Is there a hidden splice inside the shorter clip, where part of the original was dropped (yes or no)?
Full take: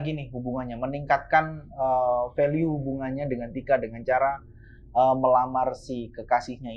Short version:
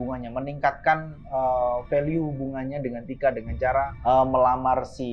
yes